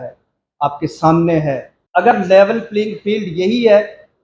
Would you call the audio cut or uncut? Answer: cut